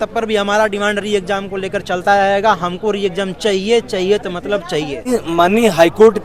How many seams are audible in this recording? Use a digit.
1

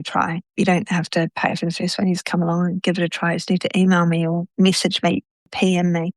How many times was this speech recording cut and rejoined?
1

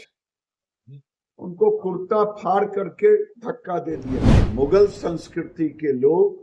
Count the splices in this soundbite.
1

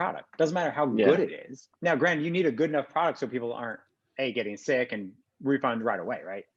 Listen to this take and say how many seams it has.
1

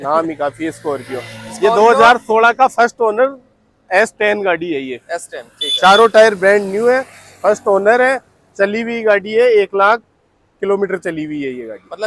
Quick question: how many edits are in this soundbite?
0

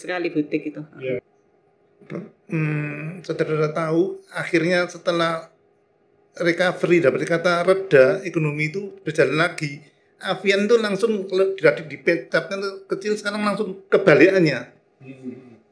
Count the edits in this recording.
1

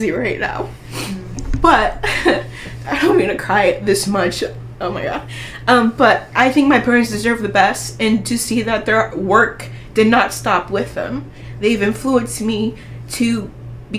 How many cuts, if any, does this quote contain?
0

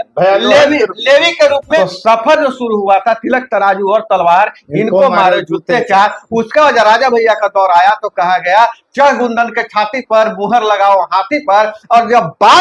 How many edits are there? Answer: 1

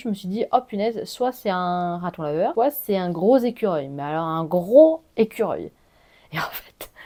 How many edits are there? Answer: 0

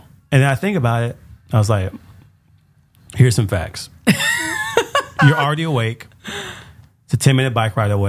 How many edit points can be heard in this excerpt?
0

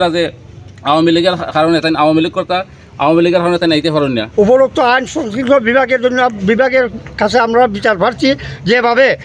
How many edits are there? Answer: 1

